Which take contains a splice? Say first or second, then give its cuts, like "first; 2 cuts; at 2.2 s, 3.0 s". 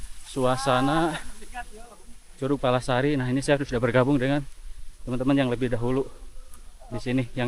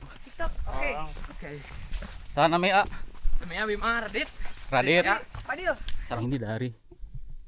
second; 1 cut; at 6.2 s